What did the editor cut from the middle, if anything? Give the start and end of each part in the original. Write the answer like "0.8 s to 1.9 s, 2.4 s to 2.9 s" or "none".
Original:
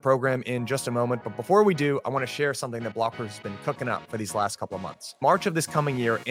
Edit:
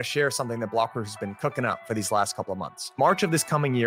none